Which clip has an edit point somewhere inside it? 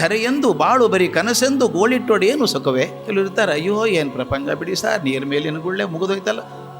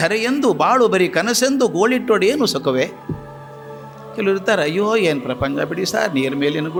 first; 1 cut; at 3.0 s

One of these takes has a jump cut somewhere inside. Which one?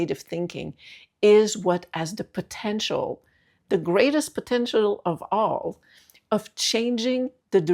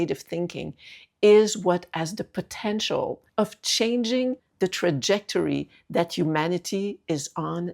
second; 2 cuts; at 3.2 s, 4.4 s

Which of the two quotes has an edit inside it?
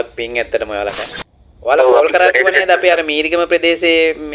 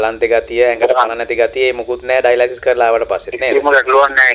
first; 1 cut; at 1.0 s

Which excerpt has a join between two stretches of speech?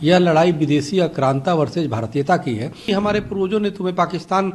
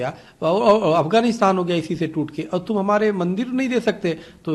first; 1 cut; at 2.9 s

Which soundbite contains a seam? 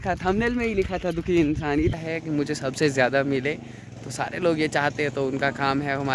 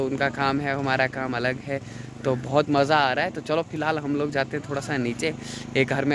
first; 1 cut; at 1.9 s

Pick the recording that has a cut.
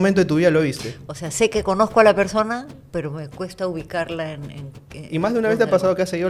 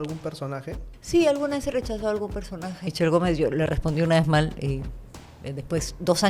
second; 2 cuts; at 0.9 s, 2.8 s

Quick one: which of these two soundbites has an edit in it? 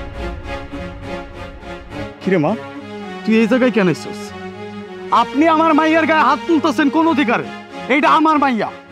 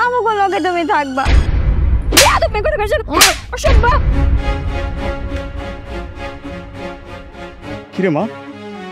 second; 1 cut; at 2.0 s

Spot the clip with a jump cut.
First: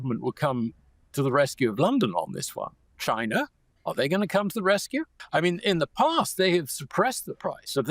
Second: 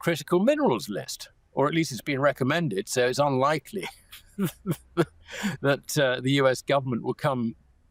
first; 3 cuts; at 2.8 s, 3.6 s, 5.2 s

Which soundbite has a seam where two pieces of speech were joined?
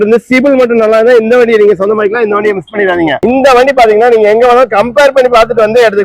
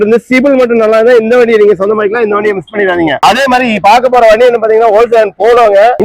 first; 1 cut; at 3.2 s

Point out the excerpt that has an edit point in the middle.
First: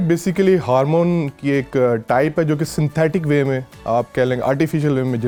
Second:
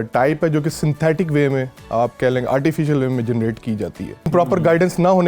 second; 1 cut; at 4.3 s

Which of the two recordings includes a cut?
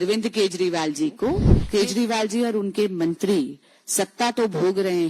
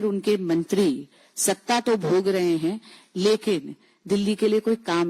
first; 1 cut; at 1.5 s

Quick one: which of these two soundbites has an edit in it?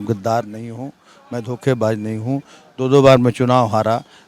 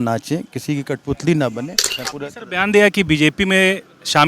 second; 1 cut; at 2.0 s

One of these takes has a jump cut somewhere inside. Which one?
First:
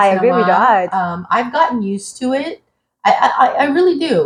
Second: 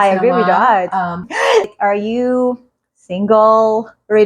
second; 1 cut; at 1.3 s

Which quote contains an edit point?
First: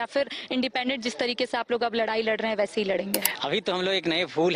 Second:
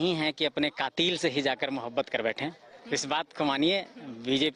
first; 1 cut; at 3.3 s

